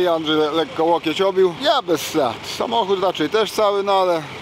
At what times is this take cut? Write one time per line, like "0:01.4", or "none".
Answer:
0:01.6